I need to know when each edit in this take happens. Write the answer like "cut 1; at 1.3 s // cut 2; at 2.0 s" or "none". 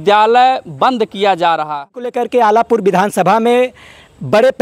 cut 1; at 2.1 s